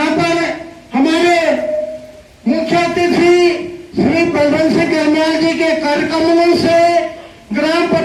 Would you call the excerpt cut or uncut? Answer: uncut